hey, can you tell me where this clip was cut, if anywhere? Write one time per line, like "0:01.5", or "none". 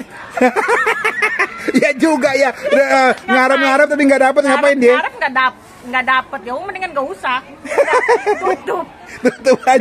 none